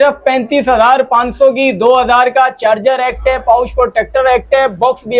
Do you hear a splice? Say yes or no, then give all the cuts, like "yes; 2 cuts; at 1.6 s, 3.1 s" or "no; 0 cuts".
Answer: no; 0 cuts